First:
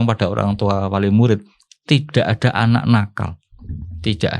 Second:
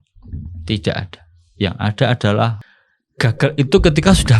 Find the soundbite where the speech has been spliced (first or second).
second